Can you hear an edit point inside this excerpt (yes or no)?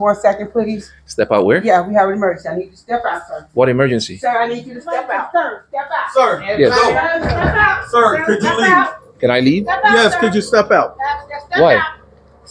yes